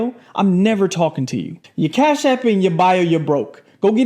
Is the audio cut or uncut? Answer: cut